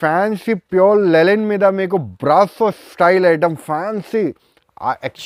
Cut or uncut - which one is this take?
uncut